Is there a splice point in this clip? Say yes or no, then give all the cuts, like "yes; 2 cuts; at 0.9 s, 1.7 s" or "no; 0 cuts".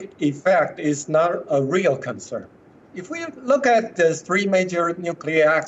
no; 0 cuts